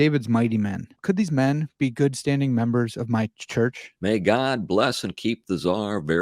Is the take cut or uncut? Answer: cut